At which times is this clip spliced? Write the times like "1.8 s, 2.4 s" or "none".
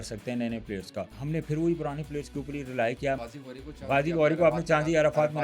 1.2 s, 3.3 s